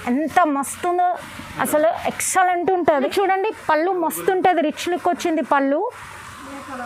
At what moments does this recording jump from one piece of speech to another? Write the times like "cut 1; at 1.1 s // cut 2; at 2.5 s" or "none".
none